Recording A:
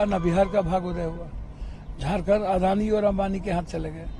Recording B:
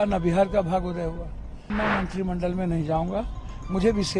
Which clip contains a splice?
B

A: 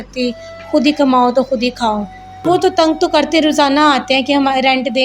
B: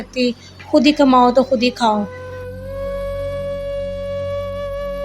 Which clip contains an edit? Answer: A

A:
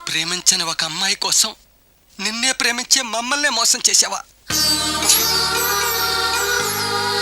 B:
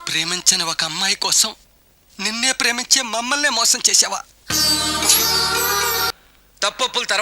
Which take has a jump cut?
B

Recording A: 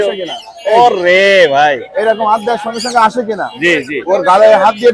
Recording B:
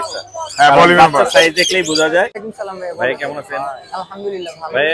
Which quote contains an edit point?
B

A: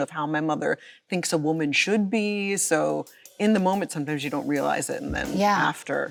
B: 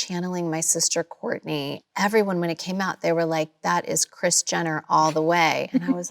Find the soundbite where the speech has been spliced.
B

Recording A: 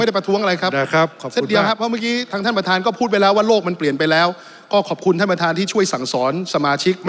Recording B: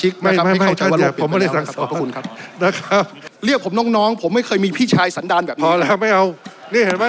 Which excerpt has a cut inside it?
B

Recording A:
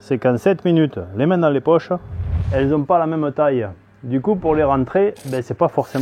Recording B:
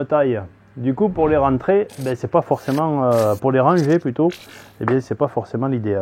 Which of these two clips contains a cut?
A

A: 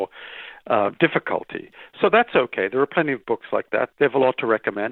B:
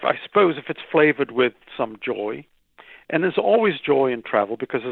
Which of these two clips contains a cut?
A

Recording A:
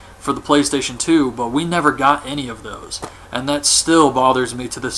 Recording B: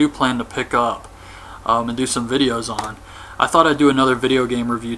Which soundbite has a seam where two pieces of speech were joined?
A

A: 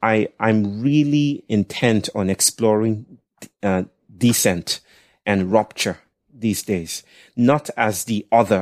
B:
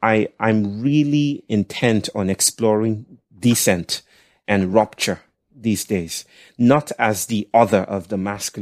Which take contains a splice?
B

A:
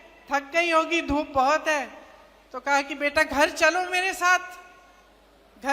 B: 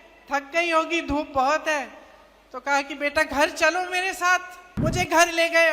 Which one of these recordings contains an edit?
B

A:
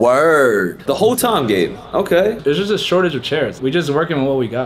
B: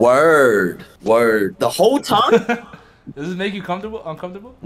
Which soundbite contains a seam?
A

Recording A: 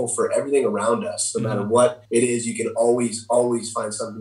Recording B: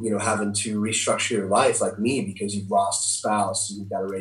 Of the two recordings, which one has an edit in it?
A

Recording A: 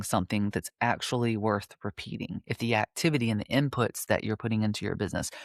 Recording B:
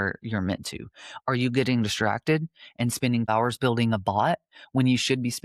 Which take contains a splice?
B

